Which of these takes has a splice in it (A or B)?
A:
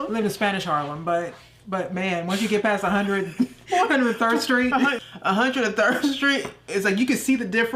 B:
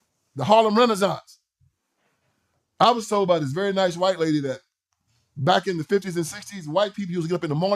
A